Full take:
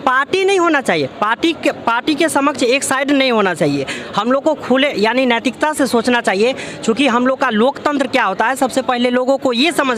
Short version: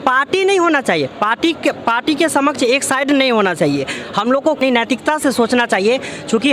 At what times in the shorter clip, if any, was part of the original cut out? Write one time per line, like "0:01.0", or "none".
0:04.6